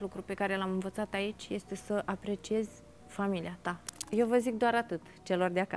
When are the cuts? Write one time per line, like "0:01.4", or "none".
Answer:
0:04.1